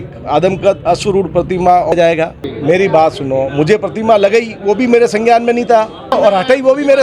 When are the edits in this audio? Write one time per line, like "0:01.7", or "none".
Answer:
0:01.9
0:06.1